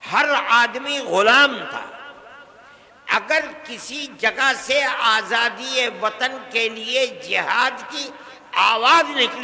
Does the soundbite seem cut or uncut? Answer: uncut